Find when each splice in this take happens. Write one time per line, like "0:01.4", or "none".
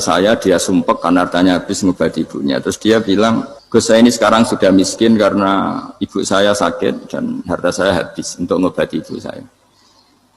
0:03.5